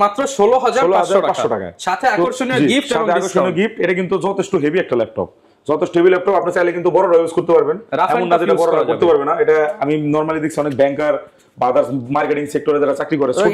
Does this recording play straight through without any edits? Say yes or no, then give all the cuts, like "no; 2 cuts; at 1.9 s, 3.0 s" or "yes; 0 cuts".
yes; 0 cuts